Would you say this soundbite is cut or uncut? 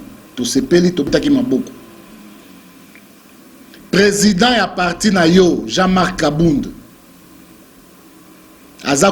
cut